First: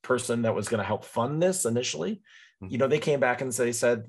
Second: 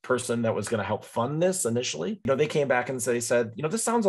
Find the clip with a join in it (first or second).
second